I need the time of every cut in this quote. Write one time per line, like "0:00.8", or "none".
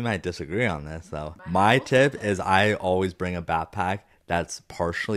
0:01.5

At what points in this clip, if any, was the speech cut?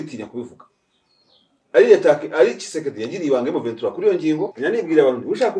0:04.5

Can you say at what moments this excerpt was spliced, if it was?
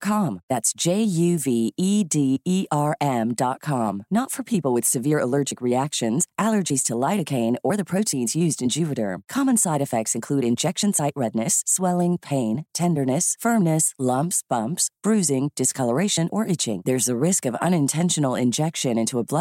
none

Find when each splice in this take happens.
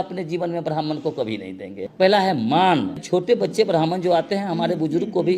0:01.9
0:03.0

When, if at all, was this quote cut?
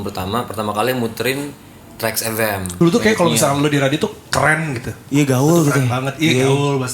0:02.6

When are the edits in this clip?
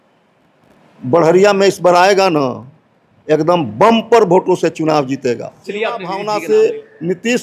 0:06.1

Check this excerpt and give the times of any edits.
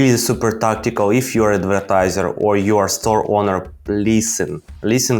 none

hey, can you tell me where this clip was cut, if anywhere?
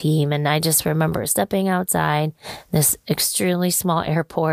none

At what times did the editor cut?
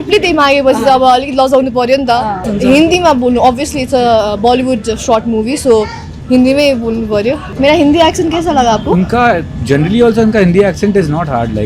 0:02.5
0:07.5

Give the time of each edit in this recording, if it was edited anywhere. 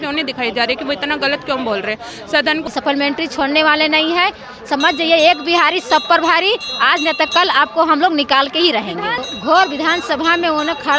0:02.7
0:09.2

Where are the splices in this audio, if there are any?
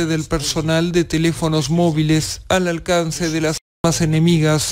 none

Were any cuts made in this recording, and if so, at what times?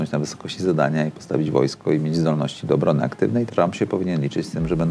0:03.5

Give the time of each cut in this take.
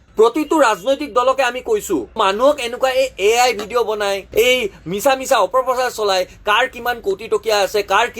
0:02.2

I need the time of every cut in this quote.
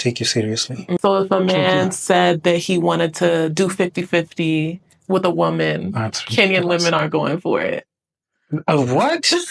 0:01.0

